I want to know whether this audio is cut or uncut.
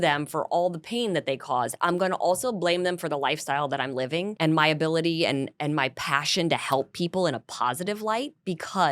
cut